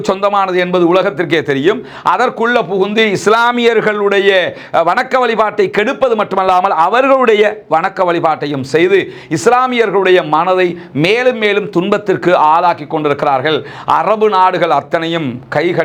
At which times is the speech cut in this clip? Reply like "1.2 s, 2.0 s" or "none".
none

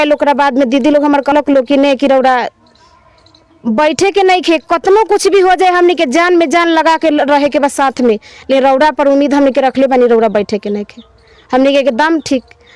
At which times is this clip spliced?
1.3 s

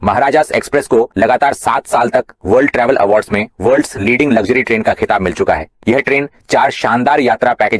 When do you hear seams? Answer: none

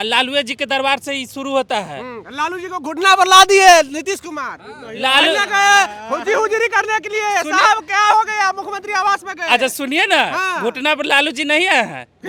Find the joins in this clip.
none

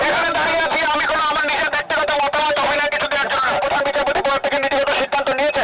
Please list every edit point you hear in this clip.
3.6 s

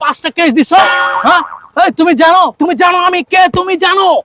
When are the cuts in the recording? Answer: none

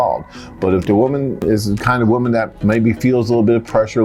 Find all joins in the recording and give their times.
1.4 s, 2.5 s

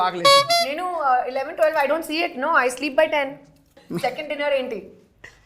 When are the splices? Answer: 3.8 s

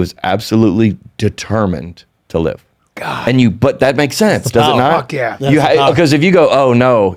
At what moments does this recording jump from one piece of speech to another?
none

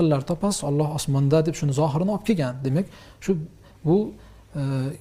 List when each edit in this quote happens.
none

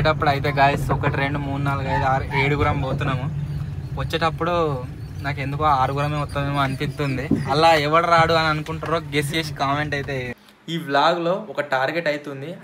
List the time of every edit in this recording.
10.3 s

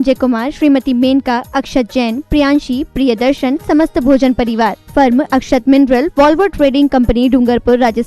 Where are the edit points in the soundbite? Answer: none

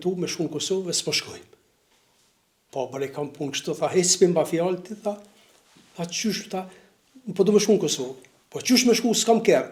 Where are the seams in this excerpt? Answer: none

